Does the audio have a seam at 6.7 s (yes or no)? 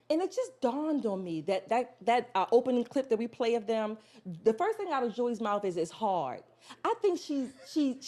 no